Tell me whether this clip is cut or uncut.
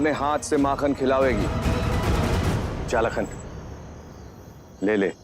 cut